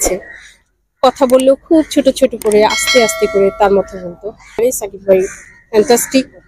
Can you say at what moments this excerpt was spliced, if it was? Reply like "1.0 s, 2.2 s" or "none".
4.6 s